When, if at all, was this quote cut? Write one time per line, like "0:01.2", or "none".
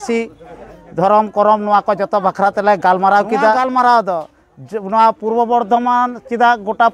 0:03.6